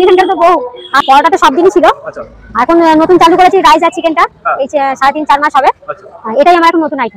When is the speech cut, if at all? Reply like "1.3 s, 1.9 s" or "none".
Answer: 1.0 s